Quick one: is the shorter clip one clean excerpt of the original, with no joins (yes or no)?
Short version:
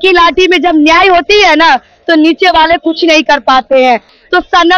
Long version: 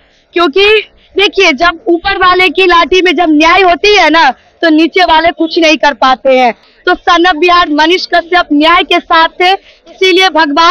yes